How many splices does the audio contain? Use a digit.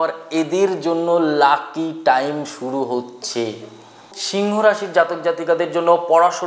1